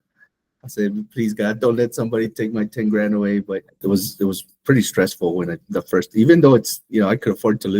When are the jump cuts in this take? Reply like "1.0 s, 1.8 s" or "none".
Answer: 3.7 s